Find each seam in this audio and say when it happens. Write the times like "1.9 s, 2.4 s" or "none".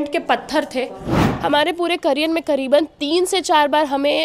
1.1 s